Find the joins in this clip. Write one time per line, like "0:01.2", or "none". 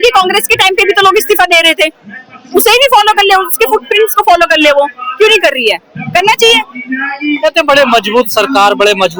none